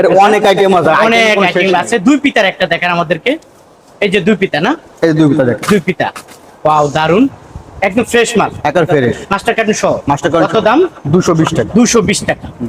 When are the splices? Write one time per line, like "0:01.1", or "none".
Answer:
none